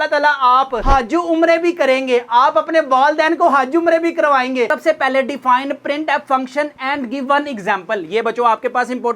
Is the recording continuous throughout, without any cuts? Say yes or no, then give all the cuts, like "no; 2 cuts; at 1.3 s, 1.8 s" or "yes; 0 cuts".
no; 1 cut; at 4.7 s